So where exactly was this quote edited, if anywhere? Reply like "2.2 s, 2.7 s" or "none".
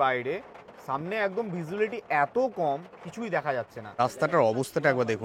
4.0 s

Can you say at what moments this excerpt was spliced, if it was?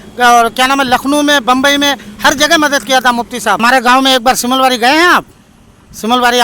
3.6 s

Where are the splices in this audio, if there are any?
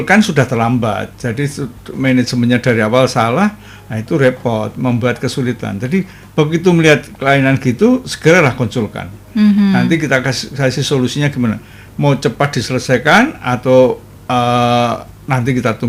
none

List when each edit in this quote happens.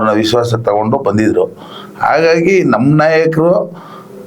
none

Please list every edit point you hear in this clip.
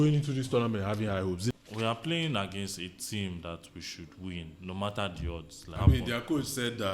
1.5 s, 5.7 s

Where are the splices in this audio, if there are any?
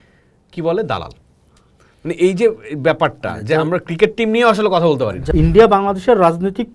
5.2 s

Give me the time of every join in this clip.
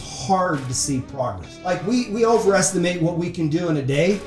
1.5 s

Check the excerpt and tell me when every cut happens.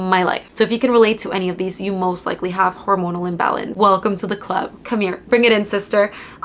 3.7 s

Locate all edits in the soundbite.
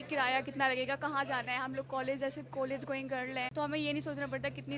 3.5 s

